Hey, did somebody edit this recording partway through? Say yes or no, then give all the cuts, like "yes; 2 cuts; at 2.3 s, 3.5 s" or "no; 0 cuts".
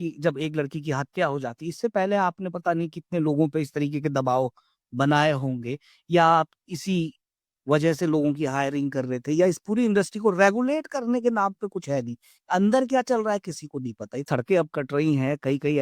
yes; 1 cut; at 14.3 s